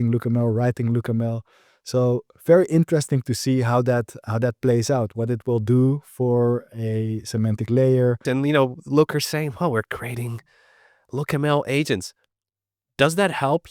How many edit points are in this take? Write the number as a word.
one